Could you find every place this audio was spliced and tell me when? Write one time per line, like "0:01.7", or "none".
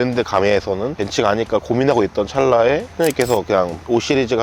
0:01.0
0:02.9